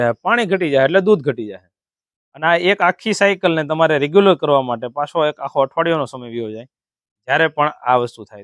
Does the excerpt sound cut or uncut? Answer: uncut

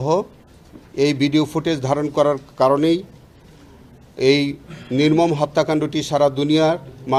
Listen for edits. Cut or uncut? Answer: uncut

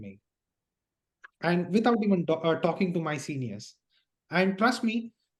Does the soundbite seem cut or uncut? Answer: uncut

